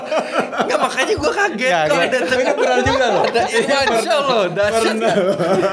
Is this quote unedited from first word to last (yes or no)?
yes